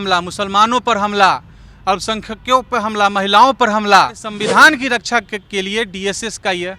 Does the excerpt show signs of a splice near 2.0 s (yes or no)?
no